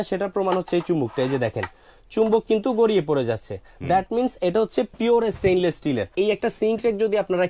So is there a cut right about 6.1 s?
yes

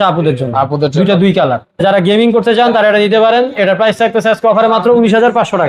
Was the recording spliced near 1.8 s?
yes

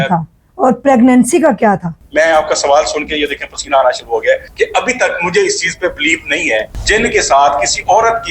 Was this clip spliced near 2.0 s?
yes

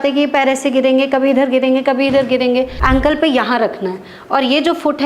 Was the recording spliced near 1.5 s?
no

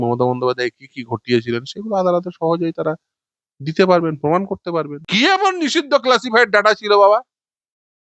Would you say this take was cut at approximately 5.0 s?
yes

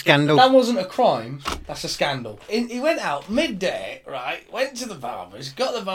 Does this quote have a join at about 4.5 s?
no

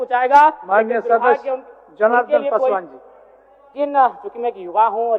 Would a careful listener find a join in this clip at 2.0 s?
no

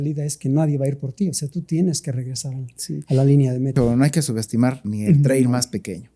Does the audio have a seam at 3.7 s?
yes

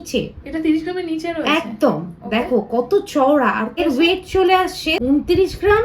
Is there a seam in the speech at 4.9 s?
yes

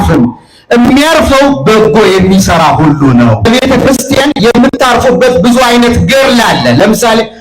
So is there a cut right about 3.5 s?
yes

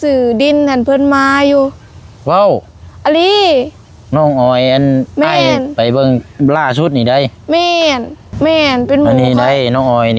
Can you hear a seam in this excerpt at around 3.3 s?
no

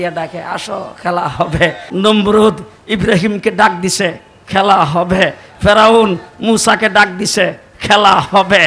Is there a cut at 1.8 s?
yes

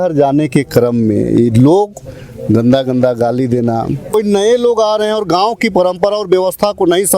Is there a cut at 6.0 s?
no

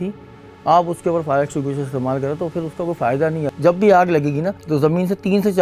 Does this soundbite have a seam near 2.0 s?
no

